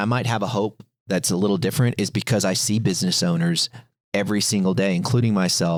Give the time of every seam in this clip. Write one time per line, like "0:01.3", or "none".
none